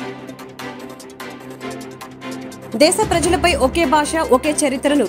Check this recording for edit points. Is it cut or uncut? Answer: uncut